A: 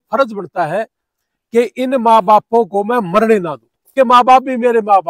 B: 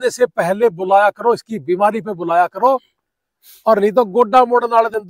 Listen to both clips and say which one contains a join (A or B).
A